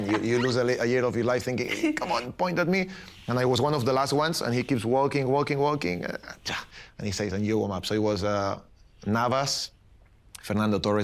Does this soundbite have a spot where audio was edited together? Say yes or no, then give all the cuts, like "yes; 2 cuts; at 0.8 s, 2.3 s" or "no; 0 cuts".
no; 0 cuts